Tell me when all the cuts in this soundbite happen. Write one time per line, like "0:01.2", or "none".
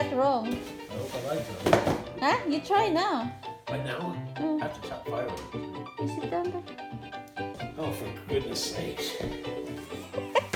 none